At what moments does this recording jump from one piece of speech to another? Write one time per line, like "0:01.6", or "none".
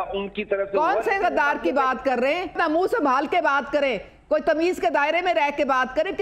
0:02.5